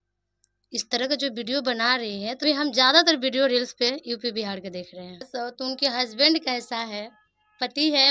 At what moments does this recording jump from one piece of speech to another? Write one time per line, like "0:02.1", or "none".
0:02.4
0:05.3